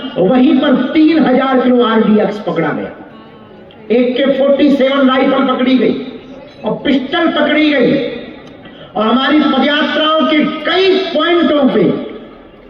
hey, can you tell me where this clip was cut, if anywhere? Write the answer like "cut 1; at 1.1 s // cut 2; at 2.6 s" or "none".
none